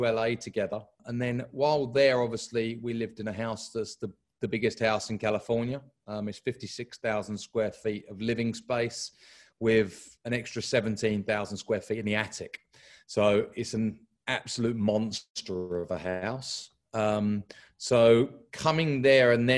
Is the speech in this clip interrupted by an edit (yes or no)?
yes